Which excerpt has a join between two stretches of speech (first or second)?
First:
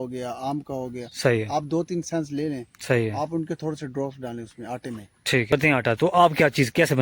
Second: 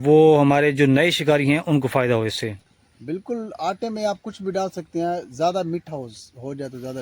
first